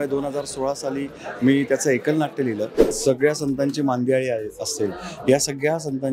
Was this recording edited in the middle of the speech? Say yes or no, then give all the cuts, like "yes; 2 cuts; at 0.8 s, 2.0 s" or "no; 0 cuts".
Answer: yes; 1 cut; at 2.9 s